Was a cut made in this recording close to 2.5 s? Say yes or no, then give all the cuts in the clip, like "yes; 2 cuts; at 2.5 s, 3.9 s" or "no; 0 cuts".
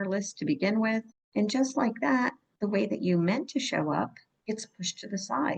yes; 3 cuts; at 1.2 s, 2.5 s, 4.3 s